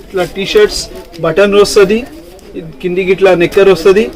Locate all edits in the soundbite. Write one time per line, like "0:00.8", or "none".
none